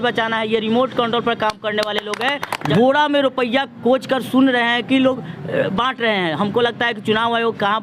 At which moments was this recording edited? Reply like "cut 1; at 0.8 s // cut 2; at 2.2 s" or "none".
cut 1; at 2.6 s

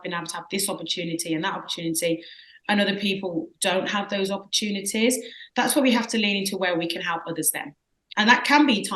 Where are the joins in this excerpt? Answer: none

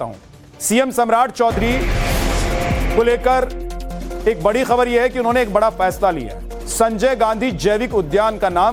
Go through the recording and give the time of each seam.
none

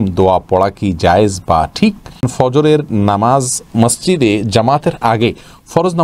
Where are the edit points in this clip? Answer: cut 1; at 2.3 s

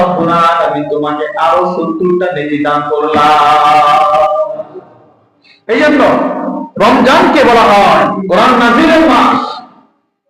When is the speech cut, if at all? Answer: cut 1; at 8.2 s

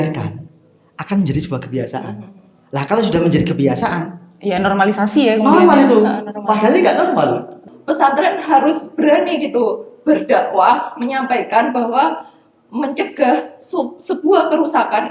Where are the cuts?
cut 1; at 7.7 s

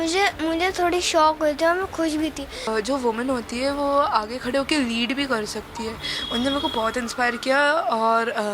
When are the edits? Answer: cut 1; at 2.7 s

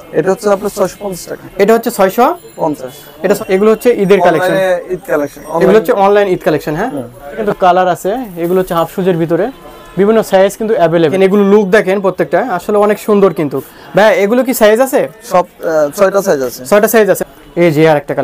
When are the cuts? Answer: cut 1; at 3.4 s // cut 2; at 7.4 s // cut 3; at 11.1 s // cut 4; at 17.2 s

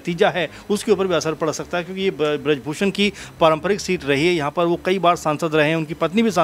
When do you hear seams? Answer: none

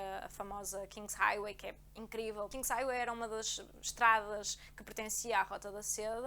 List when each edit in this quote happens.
cut 1; at 2.5 s

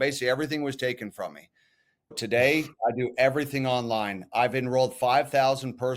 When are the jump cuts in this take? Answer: cut 1; at 2.1 s

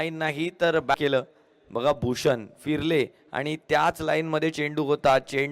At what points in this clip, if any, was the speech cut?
cut 1; at 0.9 s

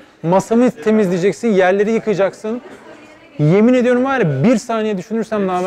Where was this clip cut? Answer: none

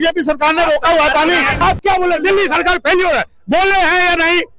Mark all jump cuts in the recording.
cut 1; at 1.6 s

